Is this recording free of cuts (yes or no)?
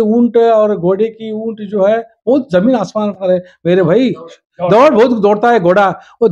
yes